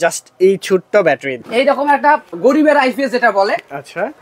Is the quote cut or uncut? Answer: cut